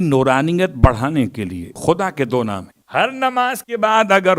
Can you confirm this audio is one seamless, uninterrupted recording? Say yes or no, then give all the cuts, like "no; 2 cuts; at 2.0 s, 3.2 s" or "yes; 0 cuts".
no; 2 cuts; at 1.8 s, 2.7 s